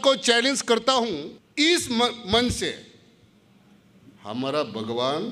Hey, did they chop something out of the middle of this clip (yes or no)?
yes